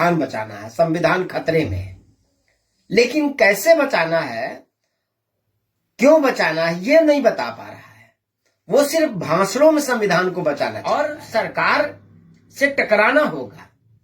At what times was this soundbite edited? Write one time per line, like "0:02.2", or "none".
0:10.8